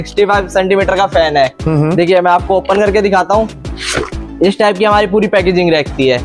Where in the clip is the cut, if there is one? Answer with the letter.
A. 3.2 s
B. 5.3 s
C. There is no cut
C